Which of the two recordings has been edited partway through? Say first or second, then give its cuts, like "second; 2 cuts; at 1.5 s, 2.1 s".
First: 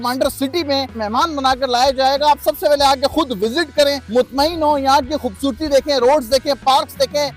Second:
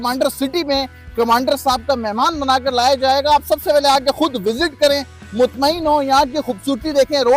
first; 2 cuts; at 1.0 s, 4.0 s